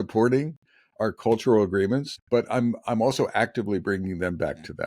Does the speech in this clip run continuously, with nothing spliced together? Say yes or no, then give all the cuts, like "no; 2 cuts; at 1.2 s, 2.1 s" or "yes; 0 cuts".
no; 1 cut; at 2.1 s